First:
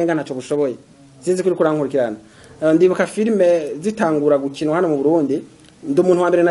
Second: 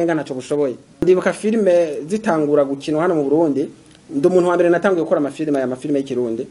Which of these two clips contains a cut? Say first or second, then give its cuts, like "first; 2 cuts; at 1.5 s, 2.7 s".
second; 1 cut; at 1.0 s